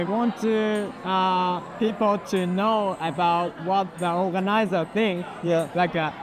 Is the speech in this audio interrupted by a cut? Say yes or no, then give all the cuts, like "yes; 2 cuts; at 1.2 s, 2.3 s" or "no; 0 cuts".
no; 0 cuts